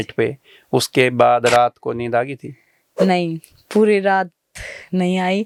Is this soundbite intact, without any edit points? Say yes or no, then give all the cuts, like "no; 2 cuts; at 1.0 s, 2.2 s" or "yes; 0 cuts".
yes; 0 cuts